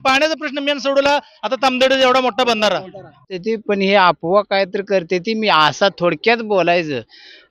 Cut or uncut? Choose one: cut